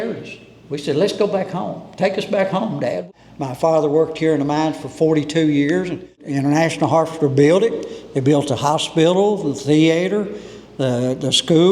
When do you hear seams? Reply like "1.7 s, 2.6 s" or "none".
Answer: 3.0 s, 6.2 s